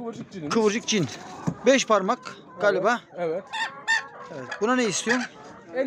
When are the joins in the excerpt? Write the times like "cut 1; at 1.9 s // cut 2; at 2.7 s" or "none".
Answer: none